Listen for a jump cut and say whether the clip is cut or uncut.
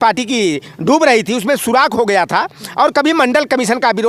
uncut